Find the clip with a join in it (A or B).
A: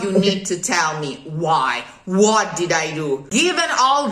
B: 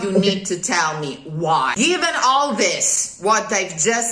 B